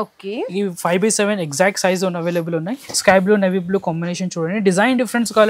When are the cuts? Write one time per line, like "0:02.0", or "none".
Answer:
0:02.8